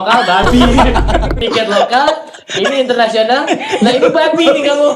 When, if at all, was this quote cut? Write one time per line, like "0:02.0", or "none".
0:01.4

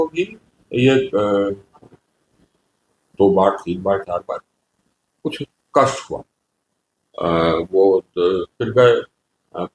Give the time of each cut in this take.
none

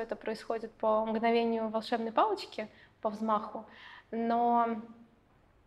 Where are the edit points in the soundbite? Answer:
none

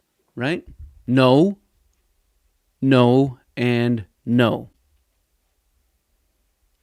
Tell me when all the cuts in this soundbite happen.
none

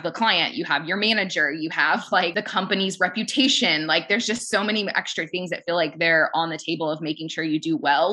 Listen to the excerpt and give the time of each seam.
0:02.3

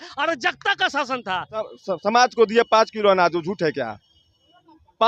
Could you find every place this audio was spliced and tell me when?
0:01.8

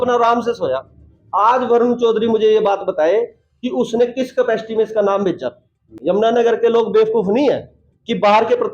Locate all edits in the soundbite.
0:06.0

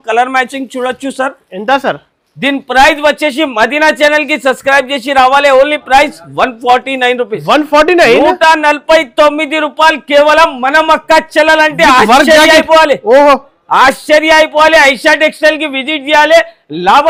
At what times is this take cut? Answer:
none

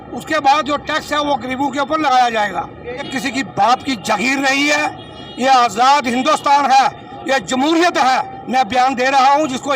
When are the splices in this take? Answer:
0:03.1

